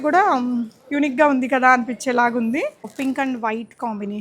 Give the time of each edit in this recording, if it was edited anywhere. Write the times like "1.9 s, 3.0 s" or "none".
2.9 s